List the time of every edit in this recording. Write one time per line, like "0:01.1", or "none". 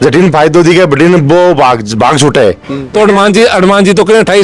0:02.7